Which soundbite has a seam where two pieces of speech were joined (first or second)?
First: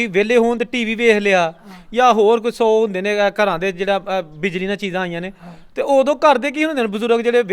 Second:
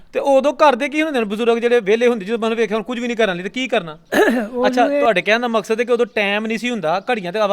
second